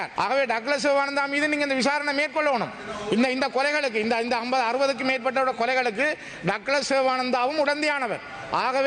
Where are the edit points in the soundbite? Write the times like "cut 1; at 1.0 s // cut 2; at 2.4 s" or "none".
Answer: none